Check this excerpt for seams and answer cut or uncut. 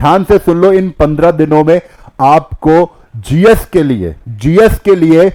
uncut